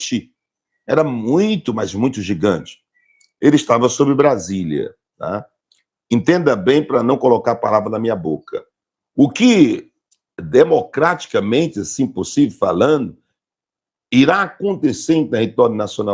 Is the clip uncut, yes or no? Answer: no